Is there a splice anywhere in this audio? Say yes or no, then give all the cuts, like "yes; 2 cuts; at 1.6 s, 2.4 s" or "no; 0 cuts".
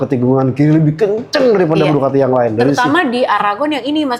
no; 0 cuts